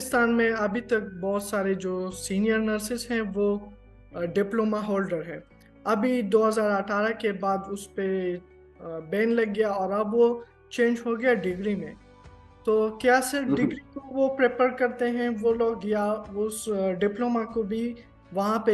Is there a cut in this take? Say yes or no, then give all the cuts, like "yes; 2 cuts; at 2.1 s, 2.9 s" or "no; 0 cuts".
no; 0 cuts